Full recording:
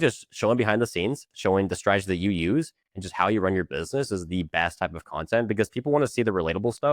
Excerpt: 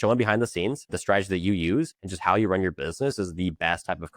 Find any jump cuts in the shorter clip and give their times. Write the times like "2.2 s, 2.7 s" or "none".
0.9 s, 2.0 s